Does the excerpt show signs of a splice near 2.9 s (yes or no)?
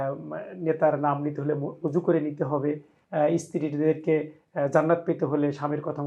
yes